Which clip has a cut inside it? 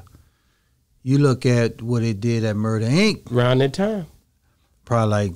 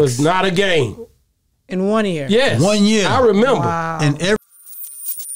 second; 1 cut; at 4.4 s

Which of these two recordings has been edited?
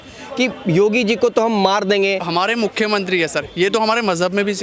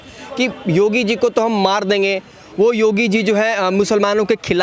first; 1 cut; at 2.2 s

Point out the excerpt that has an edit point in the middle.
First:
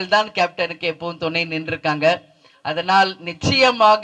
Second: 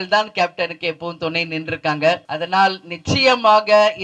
second; 1 cut; at 2.3 s

